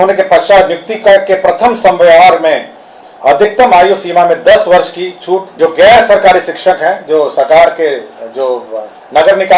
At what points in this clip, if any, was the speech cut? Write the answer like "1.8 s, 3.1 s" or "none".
5.5 s